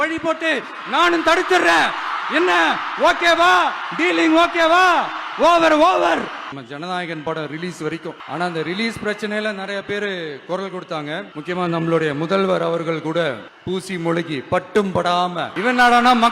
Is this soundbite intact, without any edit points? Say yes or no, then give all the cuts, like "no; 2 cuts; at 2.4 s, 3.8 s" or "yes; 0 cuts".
no; 5 cuts; at 6.5 s, 8.2 s, 11.3 s, 13.5 s, 15.5 s